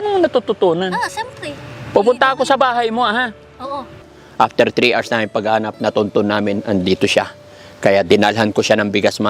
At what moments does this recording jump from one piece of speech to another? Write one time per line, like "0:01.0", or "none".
0:04.1